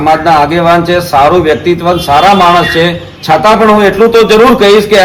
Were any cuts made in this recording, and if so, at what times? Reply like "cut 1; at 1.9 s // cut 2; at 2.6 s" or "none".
none